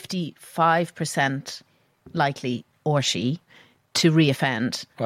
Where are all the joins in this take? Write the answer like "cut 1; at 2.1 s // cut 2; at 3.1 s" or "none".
cut 1; at 2.7 s

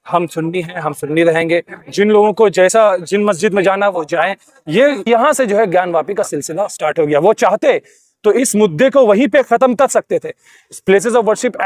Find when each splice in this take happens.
cut 1; at 5.1 s

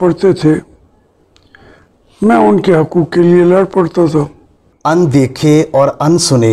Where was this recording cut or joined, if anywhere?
cut 1; at 4.7 s

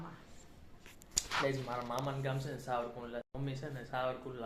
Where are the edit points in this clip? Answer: none

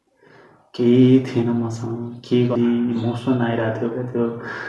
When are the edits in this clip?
cut 1; at 2.5 s

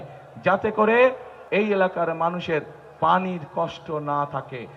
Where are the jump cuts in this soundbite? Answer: cut 1; at 1.3 s

